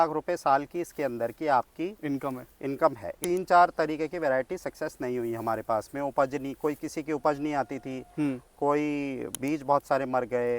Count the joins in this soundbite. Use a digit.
1